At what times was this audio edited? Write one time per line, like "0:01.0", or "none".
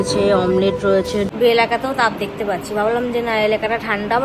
0:01.3